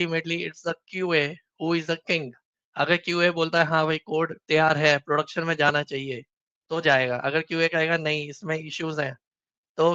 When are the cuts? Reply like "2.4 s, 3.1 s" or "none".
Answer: none